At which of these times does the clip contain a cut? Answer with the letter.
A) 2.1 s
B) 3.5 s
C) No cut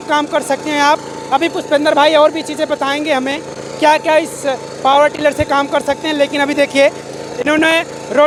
C